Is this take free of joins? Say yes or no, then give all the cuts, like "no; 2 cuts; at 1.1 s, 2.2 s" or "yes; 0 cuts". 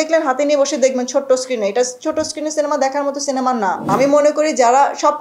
no; 1 cut; at 3.9 s